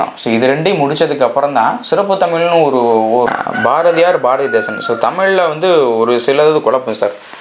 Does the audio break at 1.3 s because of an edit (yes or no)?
no